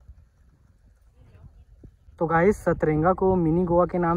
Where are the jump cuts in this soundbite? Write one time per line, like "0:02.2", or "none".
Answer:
0:02.1

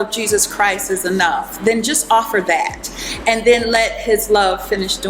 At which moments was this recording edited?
none

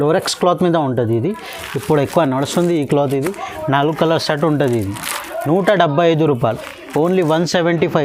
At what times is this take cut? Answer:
none

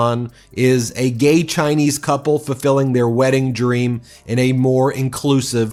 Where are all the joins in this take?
none

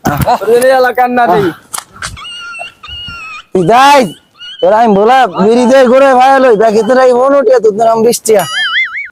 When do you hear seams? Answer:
none

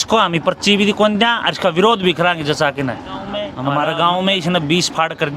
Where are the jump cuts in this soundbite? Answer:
0:03.5

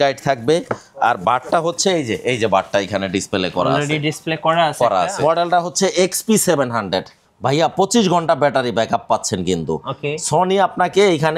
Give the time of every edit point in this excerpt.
0:05.1

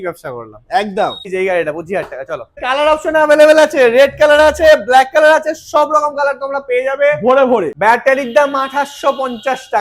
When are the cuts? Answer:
0:01.3
0:02.6
0:07.7

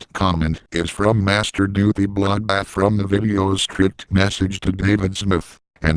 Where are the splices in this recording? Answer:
none

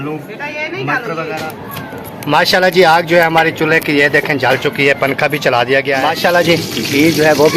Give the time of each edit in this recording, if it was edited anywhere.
0:01.5
0:06.0

